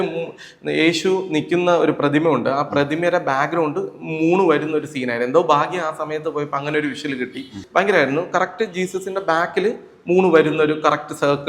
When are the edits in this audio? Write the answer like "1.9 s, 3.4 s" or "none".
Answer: 7.6 s